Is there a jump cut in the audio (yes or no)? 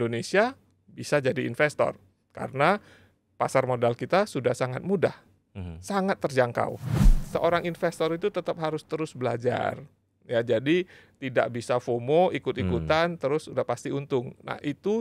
yes